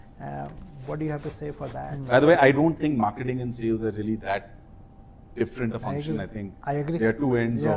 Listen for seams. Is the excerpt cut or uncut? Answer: cut